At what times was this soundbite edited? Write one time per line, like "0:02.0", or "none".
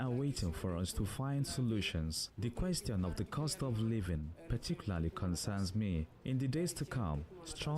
0:06.1